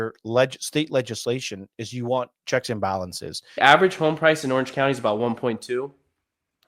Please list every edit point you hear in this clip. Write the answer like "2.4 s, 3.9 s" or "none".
3.6 s